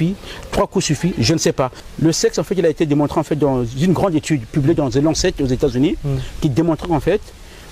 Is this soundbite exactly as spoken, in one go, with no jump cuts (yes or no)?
no